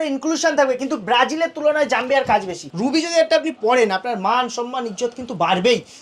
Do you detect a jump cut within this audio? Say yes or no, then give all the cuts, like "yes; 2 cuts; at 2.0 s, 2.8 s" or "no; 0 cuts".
yes; 1 cut; at 2.6 s